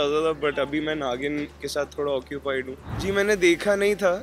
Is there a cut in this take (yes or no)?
yes